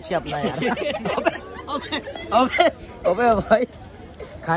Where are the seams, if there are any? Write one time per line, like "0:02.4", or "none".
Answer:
none